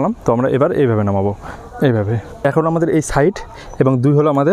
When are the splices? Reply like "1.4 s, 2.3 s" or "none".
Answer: 2.4 s